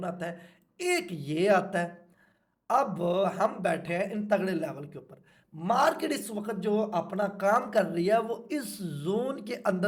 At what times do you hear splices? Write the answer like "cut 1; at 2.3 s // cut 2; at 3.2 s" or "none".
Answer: none